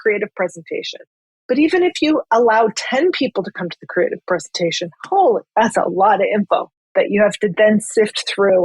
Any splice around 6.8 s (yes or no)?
yes